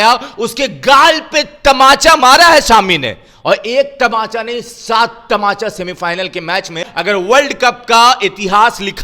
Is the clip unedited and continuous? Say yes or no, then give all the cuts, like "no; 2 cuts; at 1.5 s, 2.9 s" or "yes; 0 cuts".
no; 1 cut; at 6.9 s